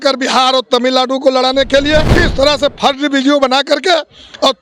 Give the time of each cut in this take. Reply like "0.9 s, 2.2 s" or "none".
2.2 s